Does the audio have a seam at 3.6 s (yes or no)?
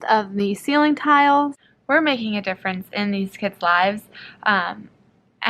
no